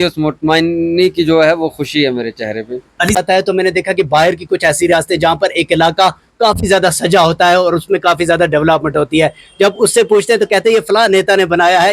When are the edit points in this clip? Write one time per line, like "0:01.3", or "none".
0:03.2